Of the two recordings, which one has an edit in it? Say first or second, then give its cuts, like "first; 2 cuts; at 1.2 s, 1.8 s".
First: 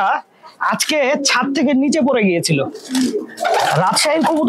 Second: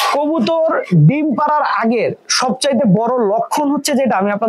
first; 1 cut; at 2.8 s